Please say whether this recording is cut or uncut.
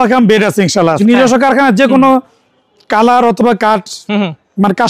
cut